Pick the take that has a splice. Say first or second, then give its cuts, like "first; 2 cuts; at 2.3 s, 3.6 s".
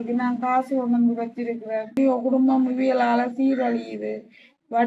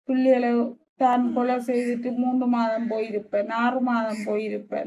first; 1 cut; at 1.9 s